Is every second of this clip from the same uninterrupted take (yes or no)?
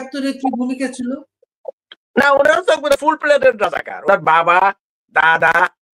yes